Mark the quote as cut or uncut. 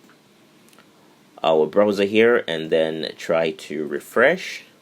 uncut